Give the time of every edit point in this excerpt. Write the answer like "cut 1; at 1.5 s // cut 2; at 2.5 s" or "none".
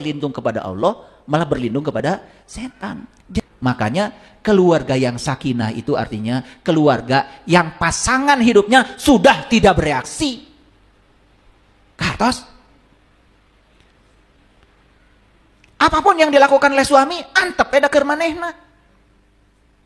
cut 1; at 3.4 s

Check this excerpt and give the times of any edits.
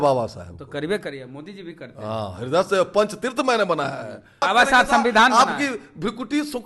cut 1; at 4.4 s

